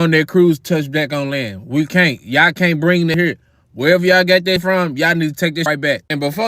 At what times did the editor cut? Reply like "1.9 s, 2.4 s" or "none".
3.1 s, 4.6 s, 5.7 s